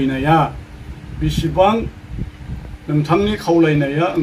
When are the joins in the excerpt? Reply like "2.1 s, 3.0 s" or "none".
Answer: none